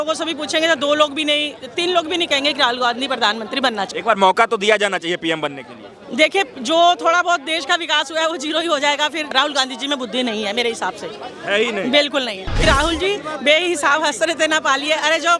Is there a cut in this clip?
yes; 3 cuts; at 3.9 s, 9.3 s, 12.6 s

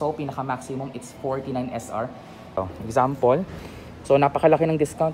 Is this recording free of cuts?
no; 1 cut; at 2.6 s

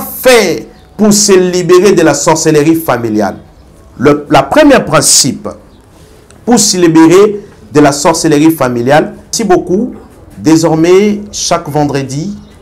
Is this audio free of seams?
no; 1 cut; at 9.2 s

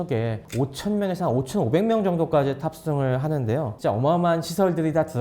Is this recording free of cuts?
no; 1 cut; at 3.7 s

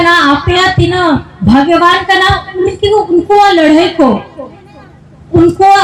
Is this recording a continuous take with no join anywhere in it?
yes; 0 cuts

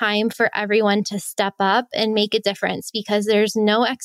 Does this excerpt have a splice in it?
no; 0 cuts

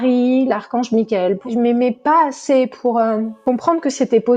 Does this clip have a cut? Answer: yes; 2 cuts; at 1.5 s, 3.3 s

